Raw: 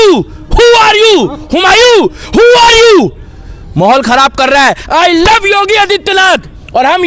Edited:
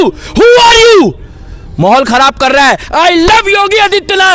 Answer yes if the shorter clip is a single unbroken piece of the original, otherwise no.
yes